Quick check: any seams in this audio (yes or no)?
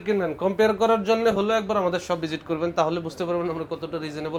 no